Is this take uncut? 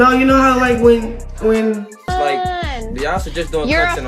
no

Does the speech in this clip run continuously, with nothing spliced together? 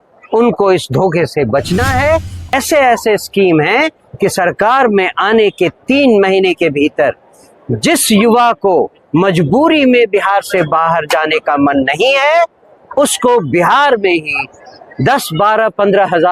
no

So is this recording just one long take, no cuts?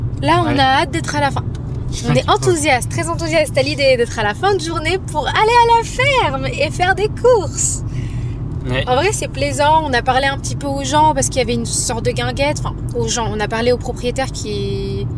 yes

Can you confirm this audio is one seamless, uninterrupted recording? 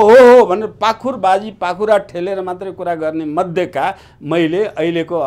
yes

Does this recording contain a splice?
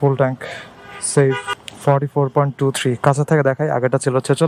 no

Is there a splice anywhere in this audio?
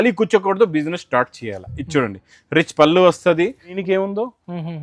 yes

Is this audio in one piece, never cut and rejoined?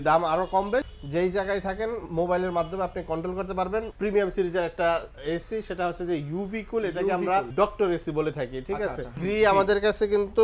no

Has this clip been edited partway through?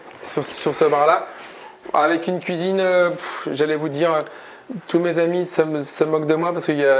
no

